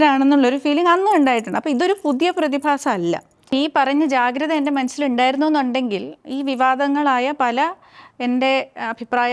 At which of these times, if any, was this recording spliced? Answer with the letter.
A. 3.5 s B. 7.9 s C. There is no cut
A